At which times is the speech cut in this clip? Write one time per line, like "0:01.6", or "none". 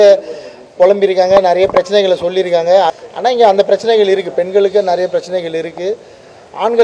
0:02.9